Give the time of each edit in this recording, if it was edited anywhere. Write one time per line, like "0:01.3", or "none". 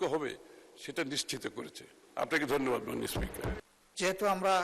0:03.6